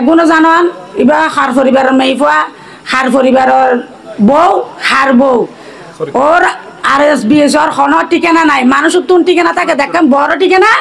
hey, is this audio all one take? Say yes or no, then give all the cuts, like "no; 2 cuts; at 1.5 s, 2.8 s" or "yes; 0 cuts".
yes; 0 cuts